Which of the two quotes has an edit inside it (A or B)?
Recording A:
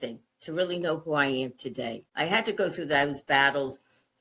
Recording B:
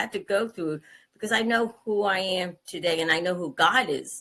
A